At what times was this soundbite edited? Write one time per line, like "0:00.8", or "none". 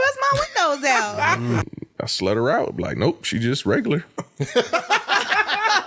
0:01.6